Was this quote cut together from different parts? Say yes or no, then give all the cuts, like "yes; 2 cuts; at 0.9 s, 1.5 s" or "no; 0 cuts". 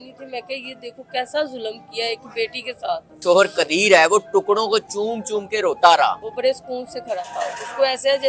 yes; 2 cuts; at 3.2 s, 6.3 s